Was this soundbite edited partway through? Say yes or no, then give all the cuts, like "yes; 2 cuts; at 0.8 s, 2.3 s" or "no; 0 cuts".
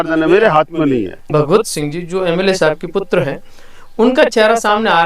yes; 1 cut; at 1.3 s